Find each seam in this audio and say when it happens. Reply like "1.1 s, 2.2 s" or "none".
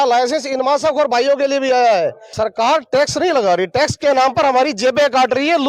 2.2 s